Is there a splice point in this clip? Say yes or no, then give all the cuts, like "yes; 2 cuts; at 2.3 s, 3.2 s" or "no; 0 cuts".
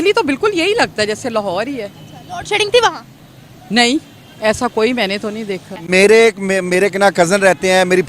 yes; 1 cut; at 5.8 s